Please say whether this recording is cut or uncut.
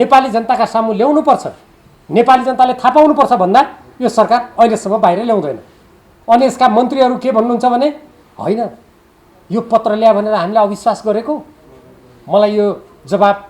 uncut